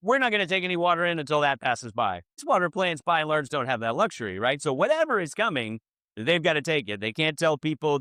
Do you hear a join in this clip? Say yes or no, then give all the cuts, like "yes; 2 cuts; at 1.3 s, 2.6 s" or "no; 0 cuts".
yes; 1 cut; at 2.3 s